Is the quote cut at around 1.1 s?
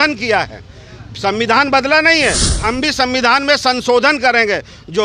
no; 1 cut; at 2.6 s

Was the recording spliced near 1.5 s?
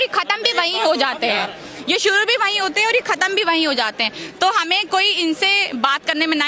no; 0 cuts

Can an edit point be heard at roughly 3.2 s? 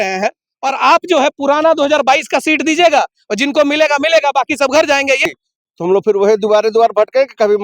no; 1 cut; at 5.2 s

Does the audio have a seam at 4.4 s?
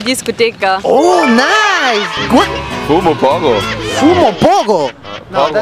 no; 1 cut; at 2.1 s

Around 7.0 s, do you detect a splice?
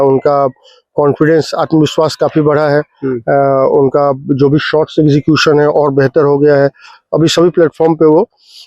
yes; 1 cut; at 7.0 s

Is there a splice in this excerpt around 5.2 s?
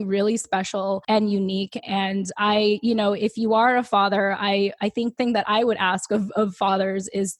yes; 2 cuts; at 1.0 s, 5.2 s

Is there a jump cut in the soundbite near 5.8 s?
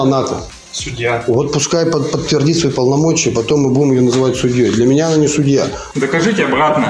yes; 1 cut; at 5.8 s

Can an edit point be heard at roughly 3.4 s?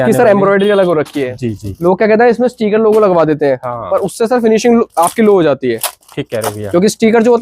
no; 1 cut; at 1.7 s

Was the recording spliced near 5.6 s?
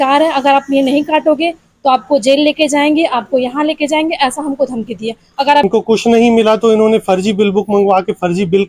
yes; 1 cut; at 5.6 s

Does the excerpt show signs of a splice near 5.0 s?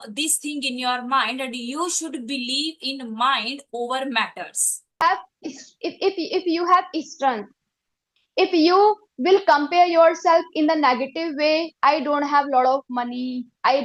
yes; 1 cut; at 5.0 s

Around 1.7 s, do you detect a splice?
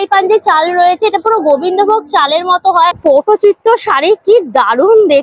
no; 1 cut; at 3.0 s

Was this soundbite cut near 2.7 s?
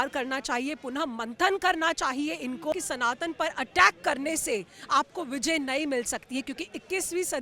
yes; 1 cut; at 2.7 s

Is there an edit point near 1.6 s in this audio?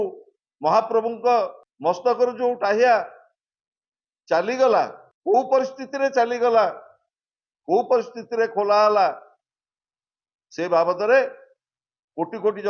yes; 2 cuts; at 1.6 s, 5.1 s

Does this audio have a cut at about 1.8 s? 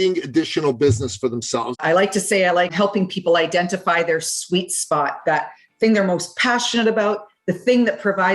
yes; 1 cut; at 1.8 s

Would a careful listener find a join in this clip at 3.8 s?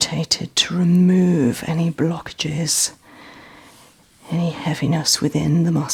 no; 0 cuts

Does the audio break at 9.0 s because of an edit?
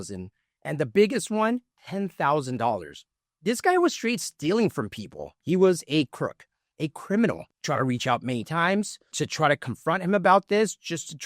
no; 1 cut; at 5.4 s

